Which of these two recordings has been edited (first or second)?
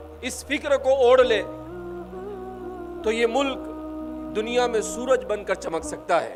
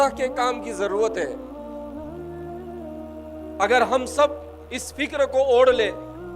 second